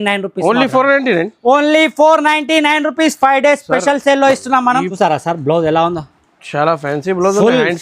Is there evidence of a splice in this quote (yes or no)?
yes